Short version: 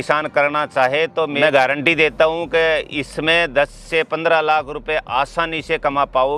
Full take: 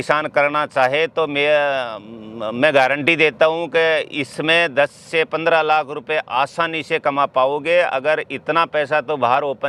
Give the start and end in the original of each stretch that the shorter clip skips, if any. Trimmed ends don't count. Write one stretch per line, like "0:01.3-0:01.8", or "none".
0:01.3-0:02.6